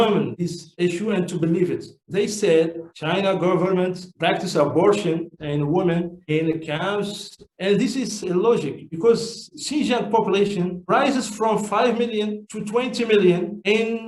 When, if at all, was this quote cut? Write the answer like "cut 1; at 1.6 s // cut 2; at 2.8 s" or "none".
none